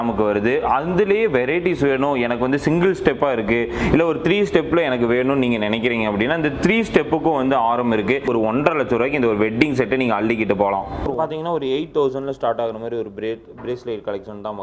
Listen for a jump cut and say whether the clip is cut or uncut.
cut